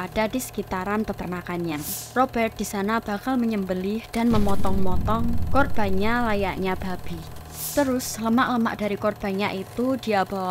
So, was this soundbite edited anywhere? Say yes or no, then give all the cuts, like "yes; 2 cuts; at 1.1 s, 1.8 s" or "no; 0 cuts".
yes; 1 cut; at 7.5 s